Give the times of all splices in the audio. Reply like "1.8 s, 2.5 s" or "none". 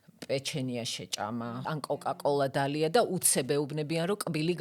1.6 s